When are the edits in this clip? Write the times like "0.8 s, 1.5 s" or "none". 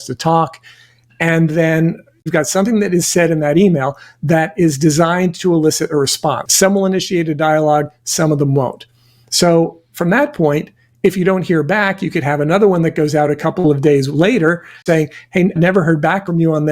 2.3 s, 6.4 s, 14.7 s